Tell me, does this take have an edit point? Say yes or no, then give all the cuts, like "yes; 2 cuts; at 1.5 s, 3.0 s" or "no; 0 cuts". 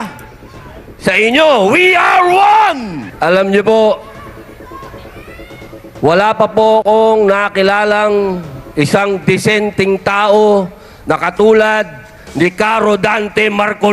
yes; 1 cut; at 3.1 s